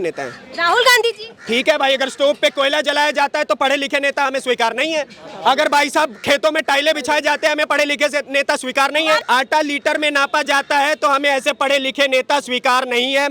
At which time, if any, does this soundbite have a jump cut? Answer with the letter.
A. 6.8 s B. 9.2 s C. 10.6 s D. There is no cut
B